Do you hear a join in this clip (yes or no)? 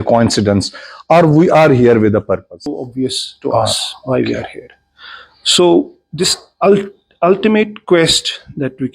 yes